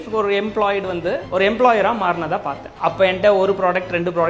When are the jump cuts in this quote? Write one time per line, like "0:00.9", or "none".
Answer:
0:01.2
0:02.6